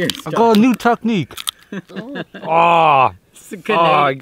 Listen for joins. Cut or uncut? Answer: uncut